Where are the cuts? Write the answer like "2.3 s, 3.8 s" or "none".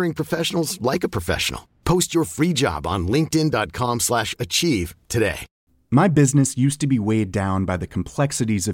5.5 s